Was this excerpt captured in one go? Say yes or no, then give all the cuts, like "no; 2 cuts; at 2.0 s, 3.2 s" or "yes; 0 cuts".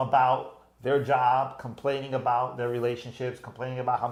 yes; 0 cuts